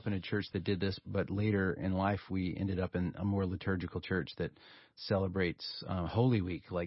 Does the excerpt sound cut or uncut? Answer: cut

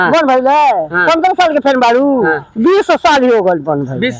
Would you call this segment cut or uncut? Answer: uncut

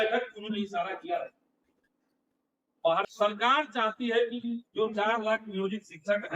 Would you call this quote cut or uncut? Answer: cut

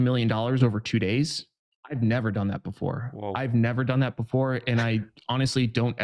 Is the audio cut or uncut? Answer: uncut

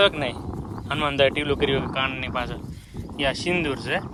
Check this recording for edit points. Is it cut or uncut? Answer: uncut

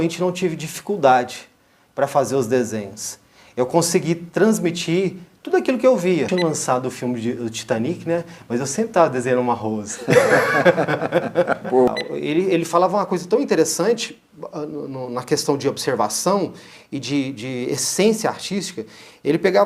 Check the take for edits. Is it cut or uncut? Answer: cut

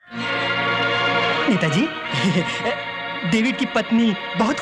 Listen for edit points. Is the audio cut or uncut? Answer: cut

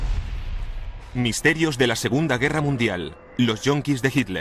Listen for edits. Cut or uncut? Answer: uncut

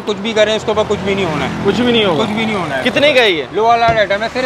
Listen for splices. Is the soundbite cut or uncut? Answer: uncut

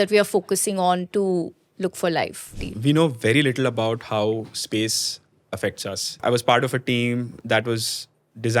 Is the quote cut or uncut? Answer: cut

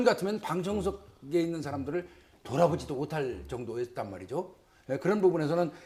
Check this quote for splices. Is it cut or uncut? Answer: uncut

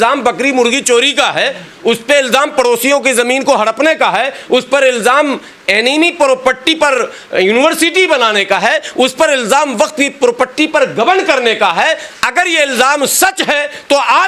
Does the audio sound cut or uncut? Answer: uncut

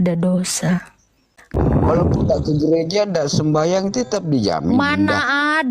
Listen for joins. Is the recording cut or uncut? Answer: cut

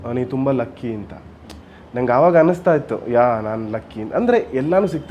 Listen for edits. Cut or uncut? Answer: uncut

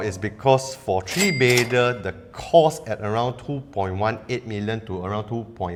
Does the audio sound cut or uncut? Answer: uncut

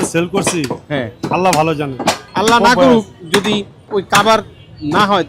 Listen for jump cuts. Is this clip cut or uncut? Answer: cut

